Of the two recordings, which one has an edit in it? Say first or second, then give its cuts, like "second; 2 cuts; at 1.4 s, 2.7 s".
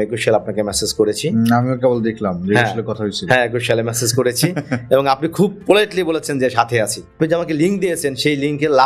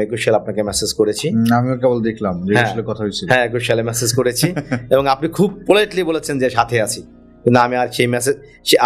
first; 1 cut; at 7.2 s